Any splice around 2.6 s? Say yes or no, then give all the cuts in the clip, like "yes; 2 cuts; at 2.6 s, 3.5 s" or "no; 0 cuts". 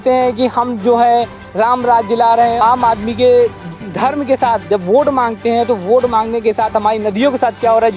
yes; 1 cut; at 2.6 s